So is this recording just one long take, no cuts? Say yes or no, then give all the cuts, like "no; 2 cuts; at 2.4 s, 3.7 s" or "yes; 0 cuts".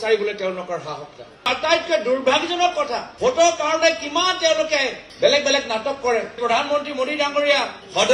no; 3 cuts; at 1.5 s, 3.1 s, 6.4 s